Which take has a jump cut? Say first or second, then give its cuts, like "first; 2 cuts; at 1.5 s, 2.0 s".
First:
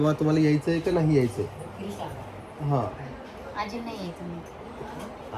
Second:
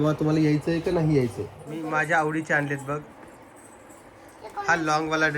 second; 1 cut; at 1.6 s